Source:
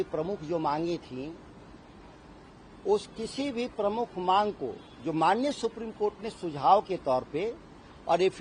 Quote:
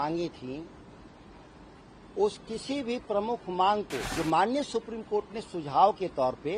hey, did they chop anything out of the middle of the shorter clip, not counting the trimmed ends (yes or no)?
yes